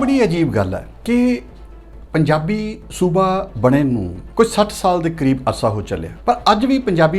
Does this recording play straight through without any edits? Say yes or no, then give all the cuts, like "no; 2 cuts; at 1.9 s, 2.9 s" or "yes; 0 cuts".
no; 3 cuts; at 0.9 s, 4.2 s, 6.1 s